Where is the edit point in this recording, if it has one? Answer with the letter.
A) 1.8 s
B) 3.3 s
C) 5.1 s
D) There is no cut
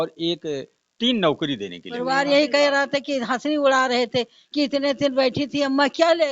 A